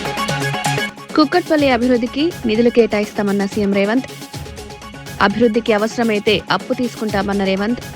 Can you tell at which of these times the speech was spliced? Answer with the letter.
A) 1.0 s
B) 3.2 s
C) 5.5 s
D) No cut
A